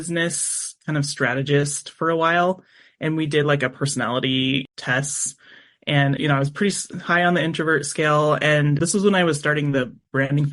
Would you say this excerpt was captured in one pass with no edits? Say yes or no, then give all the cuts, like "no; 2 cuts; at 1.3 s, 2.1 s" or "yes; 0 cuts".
no; 1 cut; at 4.6 s